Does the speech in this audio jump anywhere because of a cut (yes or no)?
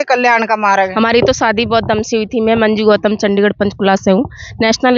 yes